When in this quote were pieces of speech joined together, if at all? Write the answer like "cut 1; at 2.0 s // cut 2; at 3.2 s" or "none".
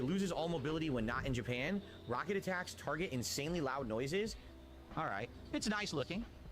cut 1; at 1.9 s